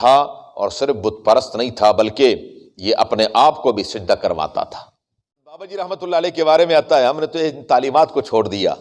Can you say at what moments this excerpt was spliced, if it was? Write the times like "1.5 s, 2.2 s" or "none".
5.6 s